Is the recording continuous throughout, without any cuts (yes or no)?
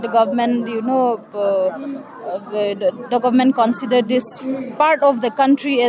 yes